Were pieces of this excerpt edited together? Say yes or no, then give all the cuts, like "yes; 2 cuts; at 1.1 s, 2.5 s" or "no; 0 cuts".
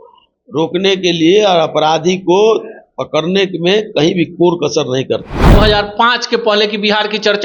yes; 1 cut; at 5.4 s